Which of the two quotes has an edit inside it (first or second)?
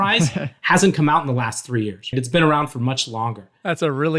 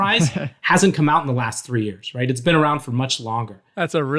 first